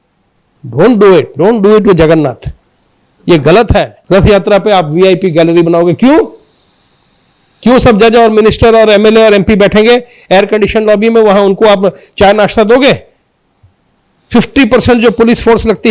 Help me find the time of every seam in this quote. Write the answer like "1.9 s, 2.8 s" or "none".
4.0 s